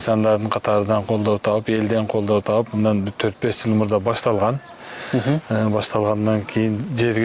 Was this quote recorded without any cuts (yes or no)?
yes